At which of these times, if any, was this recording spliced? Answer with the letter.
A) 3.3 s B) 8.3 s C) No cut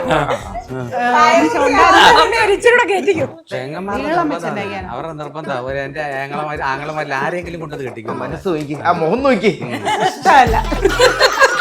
A